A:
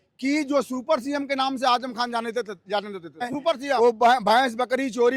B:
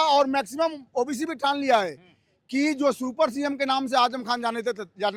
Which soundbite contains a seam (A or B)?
A